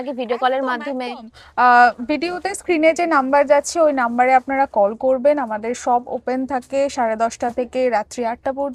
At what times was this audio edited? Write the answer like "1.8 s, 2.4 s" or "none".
none